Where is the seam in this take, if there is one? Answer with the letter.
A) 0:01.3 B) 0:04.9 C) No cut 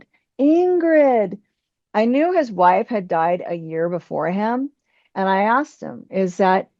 C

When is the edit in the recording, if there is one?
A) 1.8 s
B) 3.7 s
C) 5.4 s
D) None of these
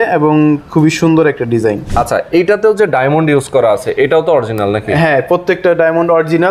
A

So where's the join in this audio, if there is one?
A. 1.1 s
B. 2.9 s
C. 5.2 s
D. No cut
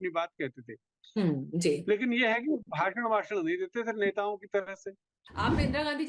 C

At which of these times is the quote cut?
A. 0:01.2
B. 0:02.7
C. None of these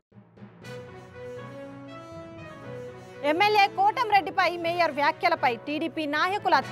B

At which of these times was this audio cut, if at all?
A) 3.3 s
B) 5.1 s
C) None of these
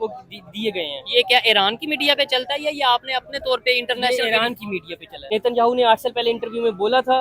B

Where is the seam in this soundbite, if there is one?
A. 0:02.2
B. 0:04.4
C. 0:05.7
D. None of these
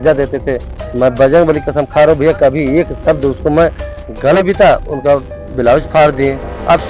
B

